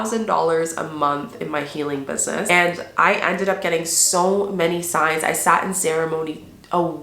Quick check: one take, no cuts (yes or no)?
no